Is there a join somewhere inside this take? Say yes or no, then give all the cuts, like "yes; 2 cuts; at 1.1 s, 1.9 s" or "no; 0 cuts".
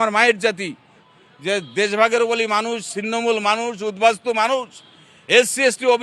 yes; 1 cut; at 1.1 s